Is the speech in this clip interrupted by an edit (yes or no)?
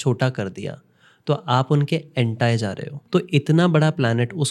yes